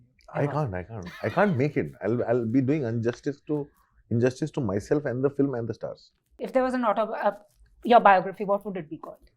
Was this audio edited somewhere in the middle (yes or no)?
yes